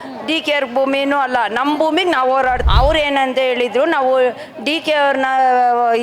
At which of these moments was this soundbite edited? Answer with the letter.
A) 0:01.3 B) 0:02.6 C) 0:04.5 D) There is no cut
B